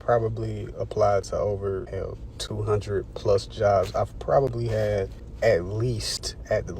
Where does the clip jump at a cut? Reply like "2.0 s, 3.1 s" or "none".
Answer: 1.9 s, 5.2 s

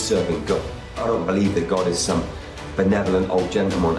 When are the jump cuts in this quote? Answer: 1.0 s

